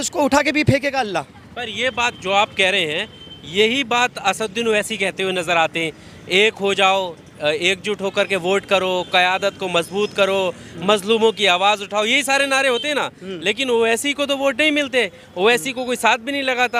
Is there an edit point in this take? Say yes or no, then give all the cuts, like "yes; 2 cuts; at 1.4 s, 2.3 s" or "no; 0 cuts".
no; 0 cuts